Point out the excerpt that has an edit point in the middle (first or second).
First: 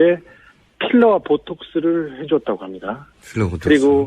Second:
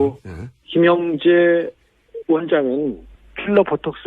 second